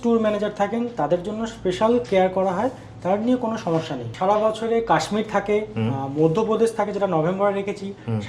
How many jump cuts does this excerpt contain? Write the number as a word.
one